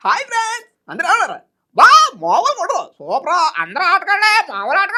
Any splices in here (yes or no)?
no